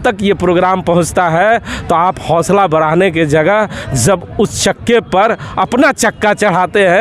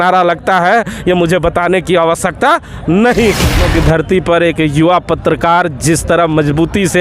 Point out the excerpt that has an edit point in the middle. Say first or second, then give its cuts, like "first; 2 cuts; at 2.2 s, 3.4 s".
second; 1 cut; at 3.6 s